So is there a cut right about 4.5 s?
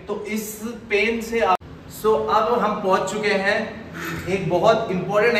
no; 1 cut; at 1.6 s

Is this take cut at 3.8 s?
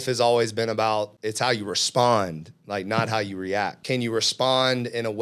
yes; 2 cuts; at 1.2 s, 3.8 s

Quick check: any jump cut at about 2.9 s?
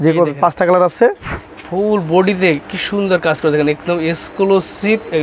no; 1 cut; at 1.3 s

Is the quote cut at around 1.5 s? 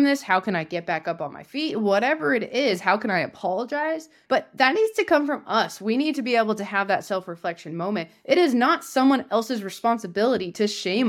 no; 1 cut; at 4.2 s

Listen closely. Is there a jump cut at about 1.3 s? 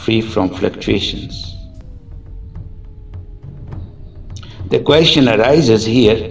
yes; 2 cuts; at 1.3 s, 4.6 s

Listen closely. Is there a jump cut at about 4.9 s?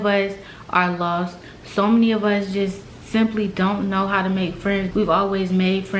yes; 1 cut; at 4.9 s

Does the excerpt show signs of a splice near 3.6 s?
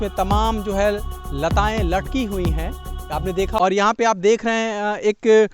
yes; 1 cut; at 3.6 s

